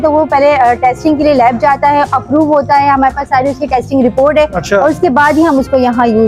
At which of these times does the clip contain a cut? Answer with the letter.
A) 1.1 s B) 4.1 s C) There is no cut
C